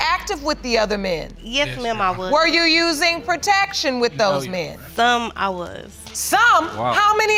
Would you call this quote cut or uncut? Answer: uncut